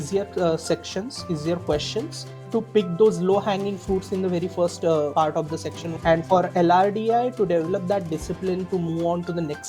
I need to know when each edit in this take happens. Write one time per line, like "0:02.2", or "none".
0:02.5
0:05.6